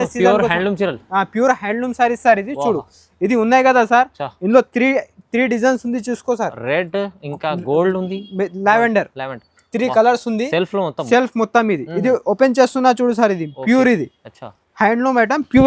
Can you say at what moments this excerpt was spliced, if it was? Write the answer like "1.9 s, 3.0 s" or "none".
none